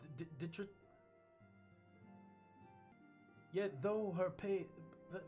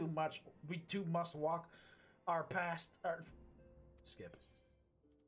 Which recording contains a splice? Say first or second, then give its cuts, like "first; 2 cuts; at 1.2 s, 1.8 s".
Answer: first; 1 cut; at 2.9 s